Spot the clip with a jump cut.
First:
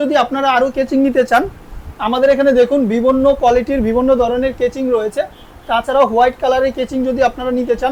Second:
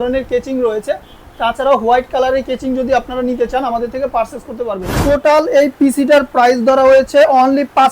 second; 1 cut; at 4.9 s

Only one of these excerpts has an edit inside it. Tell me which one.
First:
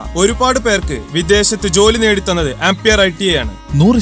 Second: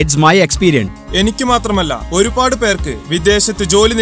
second; 1 cut; at 1.0 s

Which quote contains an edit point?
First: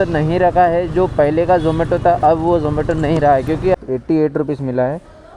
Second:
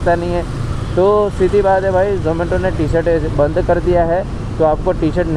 first; 1 cut; at 3.7 s

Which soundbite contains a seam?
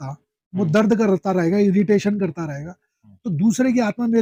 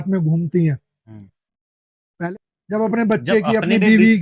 second; 1 cut; at 2.2 s

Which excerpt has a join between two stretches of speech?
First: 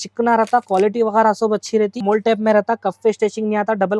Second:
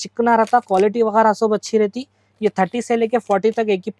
first; 1 cut; at 2.0 s

